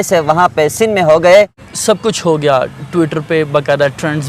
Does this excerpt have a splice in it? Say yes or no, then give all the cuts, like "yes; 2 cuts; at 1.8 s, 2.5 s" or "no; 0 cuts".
yes; 1 cut; at 1.6 s